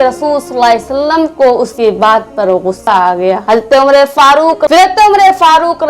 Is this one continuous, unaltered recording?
no; 1 cut; at 4.7 s

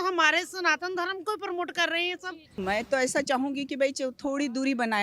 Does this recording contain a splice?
yes; 1 cut; at 2.5 s

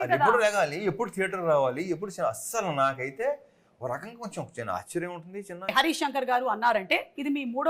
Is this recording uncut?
no; 1 cut; at 5.7 s

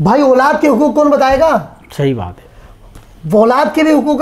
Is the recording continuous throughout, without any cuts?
yes; 0 cuts

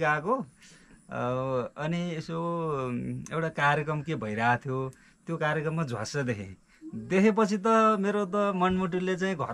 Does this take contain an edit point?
no; 0 cuts

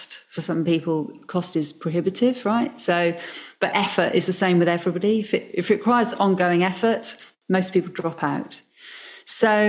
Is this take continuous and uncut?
yes; 0 cuts

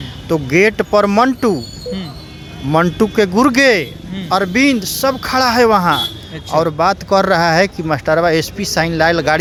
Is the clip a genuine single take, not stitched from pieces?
yes; 0 cuts

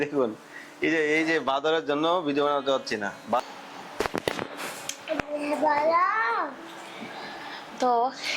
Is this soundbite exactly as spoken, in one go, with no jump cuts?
no; 1 cut; at 3.4 s

